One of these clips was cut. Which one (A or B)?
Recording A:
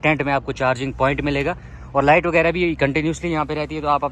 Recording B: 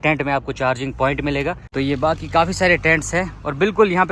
B